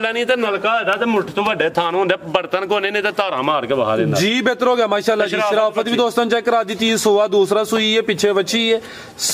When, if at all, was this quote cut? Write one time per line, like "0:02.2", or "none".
none

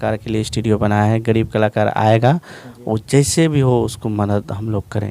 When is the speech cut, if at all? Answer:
none

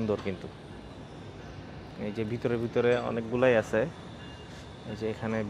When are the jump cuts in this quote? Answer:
none

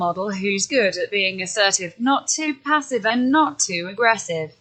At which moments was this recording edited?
none

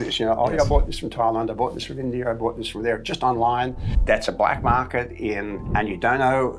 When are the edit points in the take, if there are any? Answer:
0:03.9
0:05.6

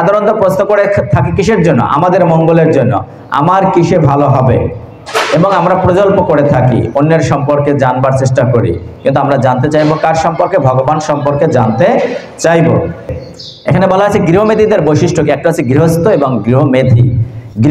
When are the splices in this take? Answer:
0:13.1

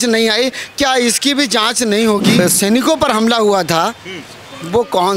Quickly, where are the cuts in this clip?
0:02.4

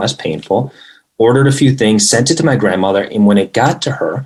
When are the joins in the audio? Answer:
none

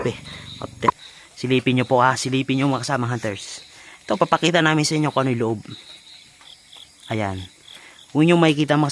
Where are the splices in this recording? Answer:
0:00.9

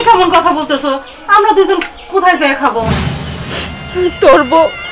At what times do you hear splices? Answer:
0:03.0

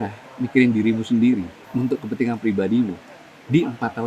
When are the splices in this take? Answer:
0:01.6

